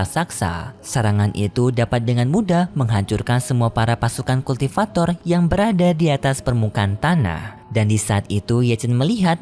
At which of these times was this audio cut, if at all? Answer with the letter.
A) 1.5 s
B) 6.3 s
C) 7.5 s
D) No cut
C